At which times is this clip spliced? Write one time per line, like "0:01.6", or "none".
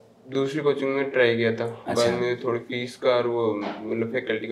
none